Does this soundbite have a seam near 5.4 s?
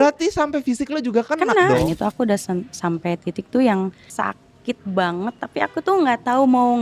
no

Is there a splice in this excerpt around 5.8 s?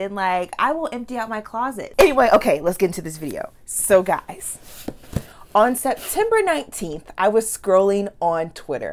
no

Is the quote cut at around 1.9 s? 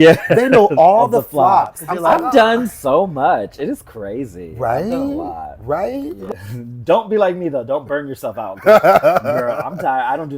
yes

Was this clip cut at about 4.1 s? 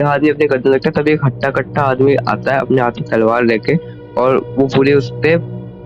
no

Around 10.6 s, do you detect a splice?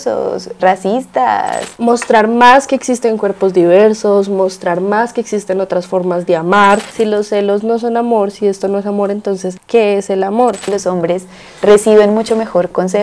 yes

